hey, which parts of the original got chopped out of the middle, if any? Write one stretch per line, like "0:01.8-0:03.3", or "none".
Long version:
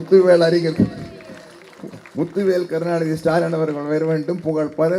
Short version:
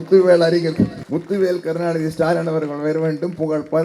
0:01.0-0:02.1